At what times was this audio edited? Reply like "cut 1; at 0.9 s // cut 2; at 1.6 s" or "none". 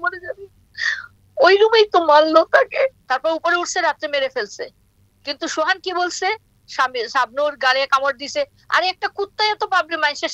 cut 1; at 3.0 s